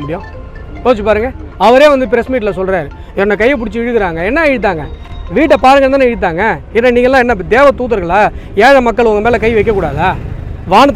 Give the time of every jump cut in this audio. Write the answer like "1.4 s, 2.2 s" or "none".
none